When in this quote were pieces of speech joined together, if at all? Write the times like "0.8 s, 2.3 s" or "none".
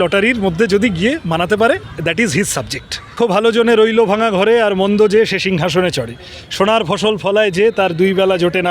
1.9 s, 3.1 s